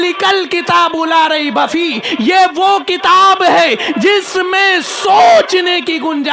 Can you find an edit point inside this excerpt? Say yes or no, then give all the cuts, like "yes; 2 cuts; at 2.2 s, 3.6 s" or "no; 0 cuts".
no; 0 cuts